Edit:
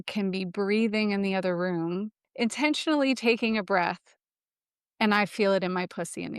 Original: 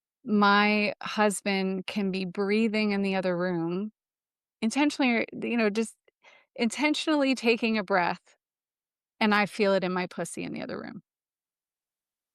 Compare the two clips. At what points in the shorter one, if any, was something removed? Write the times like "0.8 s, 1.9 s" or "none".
2.2 s